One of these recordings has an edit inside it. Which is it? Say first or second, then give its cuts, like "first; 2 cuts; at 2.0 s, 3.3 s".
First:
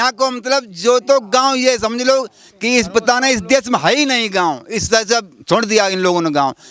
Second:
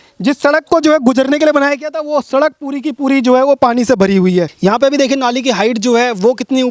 second; 1 cut; at 4.5 s